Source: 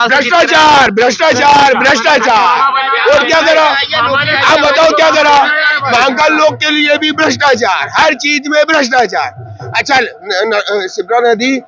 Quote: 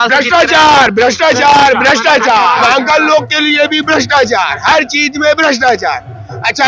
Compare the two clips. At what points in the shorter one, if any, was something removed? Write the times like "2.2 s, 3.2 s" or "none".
2.6 s